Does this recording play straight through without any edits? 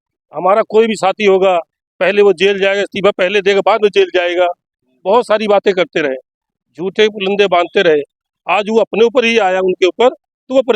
yes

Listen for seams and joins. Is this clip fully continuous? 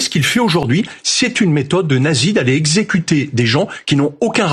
yes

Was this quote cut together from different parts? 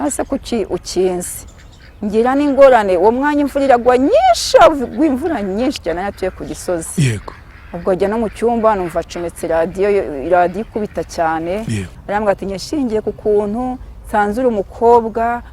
yes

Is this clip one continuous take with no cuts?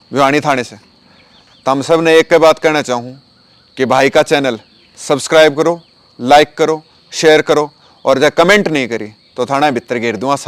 yes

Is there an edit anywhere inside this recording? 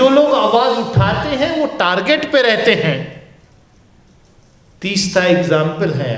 no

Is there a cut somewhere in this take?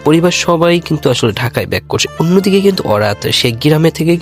yes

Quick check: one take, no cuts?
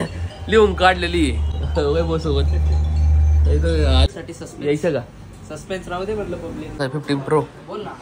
no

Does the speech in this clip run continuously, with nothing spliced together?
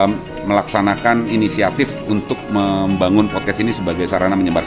yes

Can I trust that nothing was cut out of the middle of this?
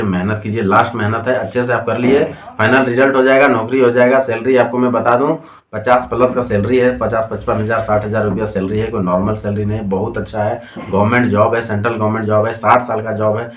yes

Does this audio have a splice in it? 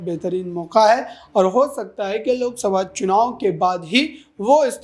no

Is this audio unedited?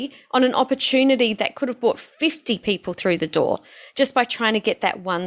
yes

